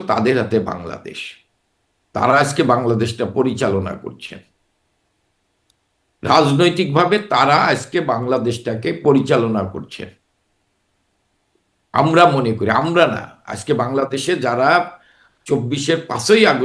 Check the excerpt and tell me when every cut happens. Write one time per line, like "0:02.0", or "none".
none